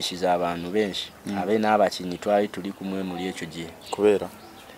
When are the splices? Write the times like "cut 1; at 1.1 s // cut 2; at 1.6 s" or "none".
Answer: none